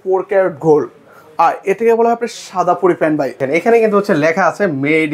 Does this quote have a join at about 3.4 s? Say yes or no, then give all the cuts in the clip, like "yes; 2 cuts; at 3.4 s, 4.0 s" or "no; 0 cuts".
yes; 1 cut; at 3.4 s